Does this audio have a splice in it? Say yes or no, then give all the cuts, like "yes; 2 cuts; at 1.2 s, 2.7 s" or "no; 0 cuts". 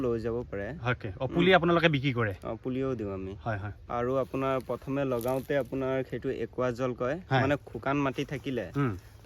no; 0 cuts